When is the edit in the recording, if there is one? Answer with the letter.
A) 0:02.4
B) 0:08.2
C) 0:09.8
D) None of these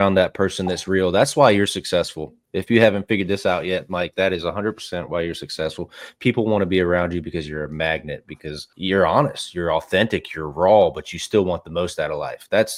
D